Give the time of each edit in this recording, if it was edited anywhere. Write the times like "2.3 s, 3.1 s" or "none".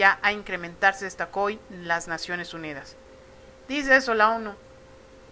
none